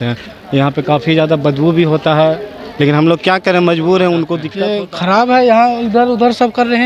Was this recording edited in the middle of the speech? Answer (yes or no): yes